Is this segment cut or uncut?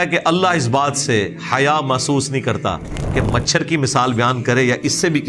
uncut